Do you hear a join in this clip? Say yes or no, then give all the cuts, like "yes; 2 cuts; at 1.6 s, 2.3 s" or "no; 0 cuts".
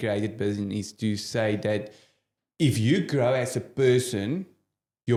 no; 0 cuts